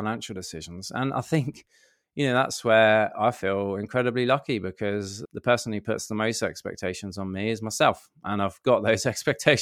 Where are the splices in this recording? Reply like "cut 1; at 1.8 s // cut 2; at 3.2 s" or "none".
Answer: cut 1; at 5.2 s